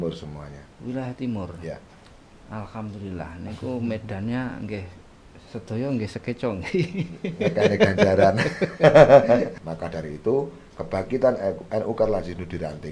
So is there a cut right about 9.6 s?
yes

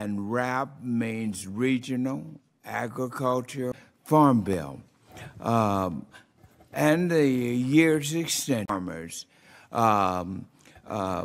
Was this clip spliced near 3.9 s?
no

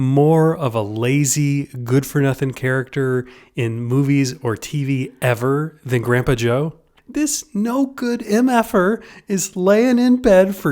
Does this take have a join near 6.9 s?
yes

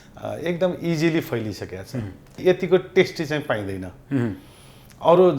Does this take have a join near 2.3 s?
yes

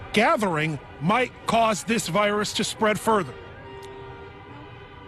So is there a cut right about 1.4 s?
no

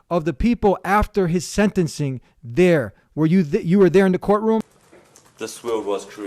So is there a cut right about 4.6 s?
yes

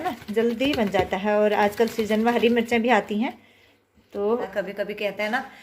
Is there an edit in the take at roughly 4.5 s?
yes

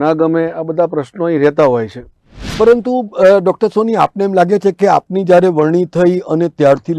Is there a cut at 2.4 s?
yes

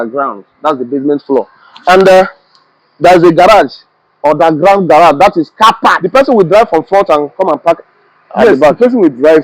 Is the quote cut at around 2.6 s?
no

